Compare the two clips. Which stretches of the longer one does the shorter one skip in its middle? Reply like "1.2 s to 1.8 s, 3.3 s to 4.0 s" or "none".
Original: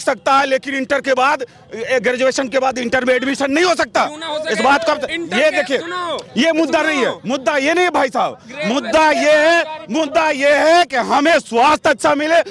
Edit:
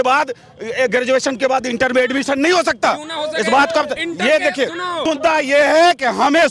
6.1 s to 9.8 s